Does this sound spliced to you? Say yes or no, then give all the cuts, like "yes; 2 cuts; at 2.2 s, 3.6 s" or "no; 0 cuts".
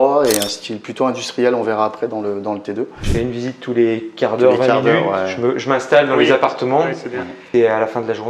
yes; 2 cuts; at 3.0 s, 7.4 s